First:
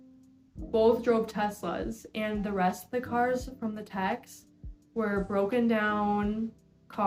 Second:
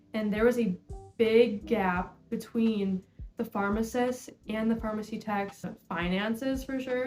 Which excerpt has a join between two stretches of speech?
second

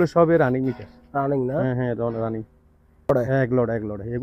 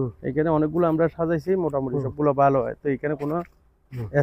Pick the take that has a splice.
first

